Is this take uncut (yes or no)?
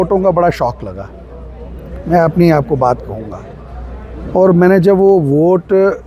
yes